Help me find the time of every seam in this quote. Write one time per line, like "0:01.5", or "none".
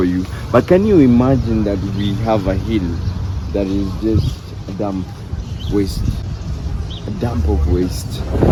none